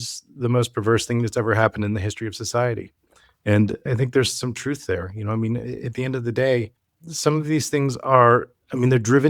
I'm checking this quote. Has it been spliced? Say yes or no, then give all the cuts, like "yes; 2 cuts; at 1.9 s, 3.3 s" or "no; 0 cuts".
yes; 1 cut; at 3.8 s